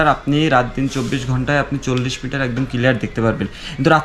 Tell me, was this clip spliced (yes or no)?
no